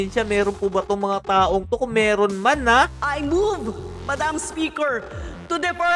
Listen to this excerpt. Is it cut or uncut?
cut